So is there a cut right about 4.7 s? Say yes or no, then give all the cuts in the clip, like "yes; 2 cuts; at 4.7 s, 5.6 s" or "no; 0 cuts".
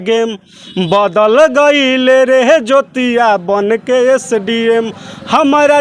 no; 0 cuts